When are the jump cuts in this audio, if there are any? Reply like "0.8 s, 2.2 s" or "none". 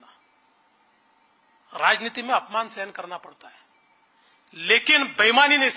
none

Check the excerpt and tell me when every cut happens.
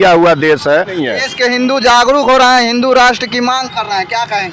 1.0 s

